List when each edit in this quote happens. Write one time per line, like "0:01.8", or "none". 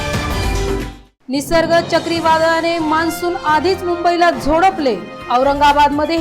0:00.9